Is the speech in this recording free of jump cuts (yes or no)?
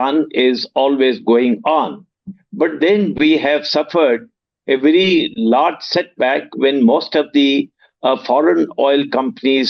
yes